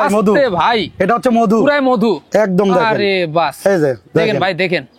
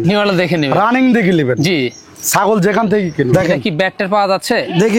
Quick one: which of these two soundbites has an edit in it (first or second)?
second